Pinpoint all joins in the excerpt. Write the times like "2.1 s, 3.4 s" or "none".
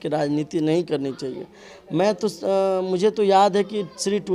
none